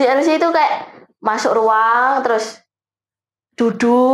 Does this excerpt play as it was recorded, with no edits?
yes; 0 cuts

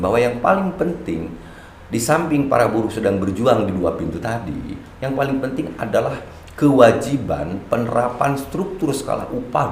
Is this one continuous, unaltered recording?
yes; 0 cuts

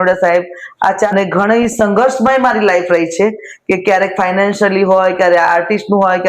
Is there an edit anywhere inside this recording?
yes; 1 cut; at 1.1 s

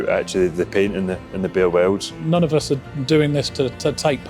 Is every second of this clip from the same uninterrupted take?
no; 1 cut; at 2.1 s

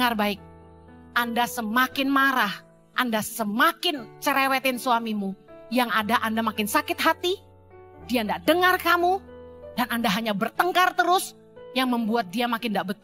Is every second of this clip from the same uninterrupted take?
yes; 0 cuts

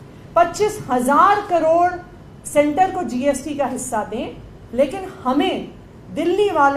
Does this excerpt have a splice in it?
no; 0 cuts

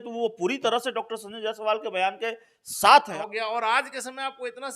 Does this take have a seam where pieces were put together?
yes; 1 cut; at 3.1 s

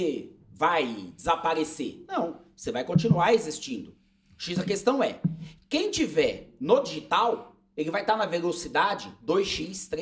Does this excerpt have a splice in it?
no; 0 cuts

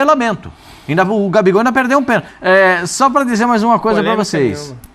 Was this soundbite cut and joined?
yes; 1 cut; at 2.3 s

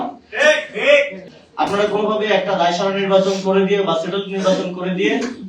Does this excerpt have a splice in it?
yes; 1 cut; at 1.3 s

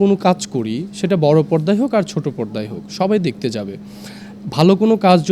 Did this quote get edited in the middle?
no; 0 cuts

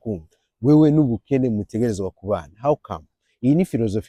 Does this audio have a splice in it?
no; 0 cuts

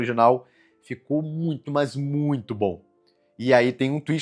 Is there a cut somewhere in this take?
no; 0 cuts

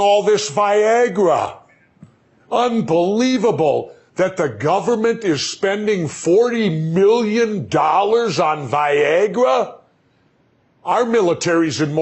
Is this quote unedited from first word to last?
yes; 0 cuts

